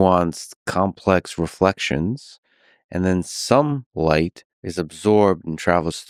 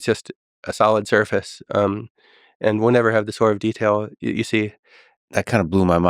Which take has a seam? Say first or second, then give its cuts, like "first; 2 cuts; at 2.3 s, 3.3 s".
second; 1 cut; at 5.1 s